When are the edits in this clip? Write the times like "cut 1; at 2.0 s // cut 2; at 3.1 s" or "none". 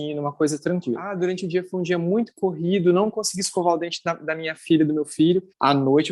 cut 1; at 1.1 s